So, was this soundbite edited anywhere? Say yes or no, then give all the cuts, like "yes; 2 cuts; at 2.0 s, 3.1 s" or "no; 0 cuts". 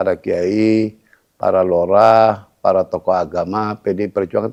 no; 0 cuts